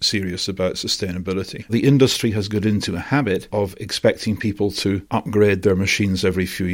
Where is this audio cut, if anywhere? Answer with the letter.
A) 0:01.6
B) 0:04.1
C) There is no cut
A